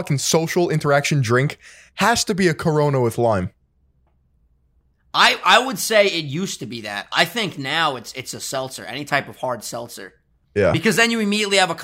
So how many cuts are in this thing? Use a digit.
0